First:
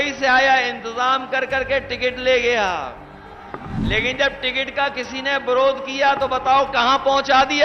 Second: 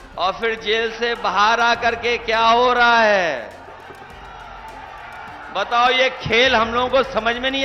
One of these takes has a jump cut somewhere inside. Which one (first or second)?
first